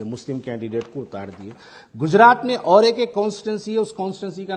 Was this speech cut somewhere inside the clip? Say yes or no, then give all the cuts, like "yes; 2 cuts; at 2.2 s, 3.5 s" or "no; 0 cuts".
no; 0 cuts